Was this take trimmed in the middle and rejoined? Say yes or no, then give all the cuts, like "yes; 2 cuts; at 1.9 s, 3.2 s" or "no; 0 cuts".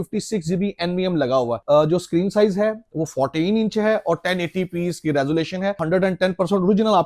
yes; 1 cut; at 5.8 s